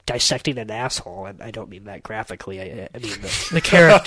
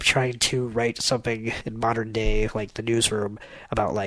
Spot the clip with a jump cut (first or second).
second